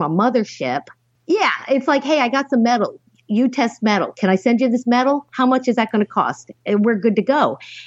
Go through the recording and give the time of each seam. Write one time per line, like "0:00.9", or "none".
none